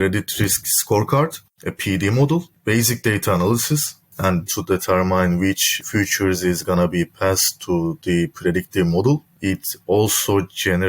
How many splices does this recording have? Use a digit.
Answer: 4